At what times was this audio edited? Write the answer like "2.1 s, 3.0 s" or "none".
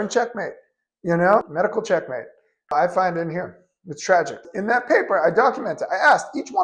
4.5 s